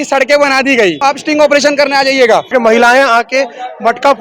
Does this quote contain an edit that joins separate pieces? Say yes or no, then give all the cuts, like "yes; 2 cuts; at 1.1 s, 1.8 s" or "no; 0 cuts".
yes; 2 cuts; at 1.0 s, 2.5 s